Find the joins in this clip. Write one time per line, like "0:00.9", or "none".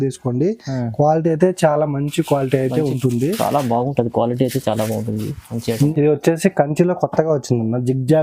0:05.9